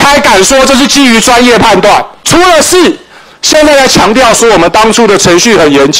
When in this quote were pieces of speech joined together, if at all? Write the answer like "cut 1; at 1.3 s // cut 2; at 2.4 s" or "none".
cut 1; at 2.2 s